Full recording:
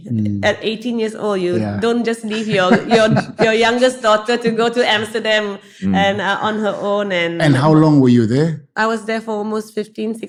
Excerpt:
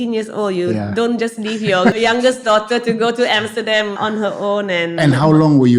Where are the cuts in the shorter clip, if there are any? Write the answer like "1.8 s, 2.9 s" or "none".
2.0 s, 4.0 s